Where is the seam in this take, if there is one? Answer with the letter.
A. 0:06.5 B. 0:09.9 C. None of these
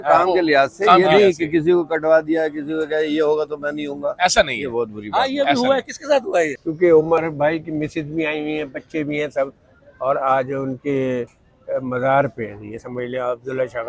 A